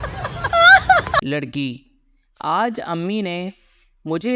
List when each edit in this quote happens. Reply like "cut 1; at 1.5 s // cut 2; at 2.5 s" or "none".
cut 1; at 1.2 s

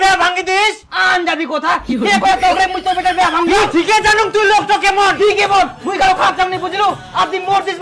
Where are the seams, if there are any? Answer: cut 1; at 3.6 s

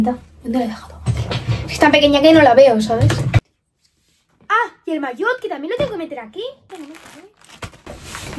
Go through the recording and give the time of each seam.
cut 1; at 3.3 s // cut 2; at 6.7 s

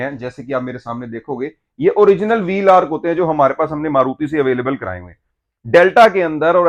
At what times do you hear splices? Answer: none

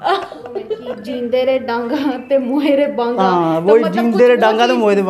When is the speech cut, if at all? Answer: cut 1; at 0.9 s

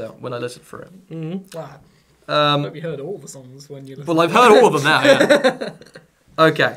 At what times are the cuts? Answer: cut 1; at 4.3 s

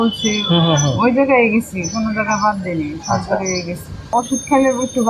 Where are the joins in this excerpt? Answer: cut 1; at 4.1 s

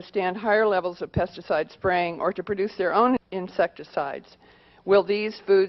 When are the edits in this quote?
cut 1; at 2.9 s

